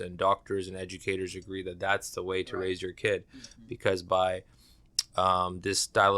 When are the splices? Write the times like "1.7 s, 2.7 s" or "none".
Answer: none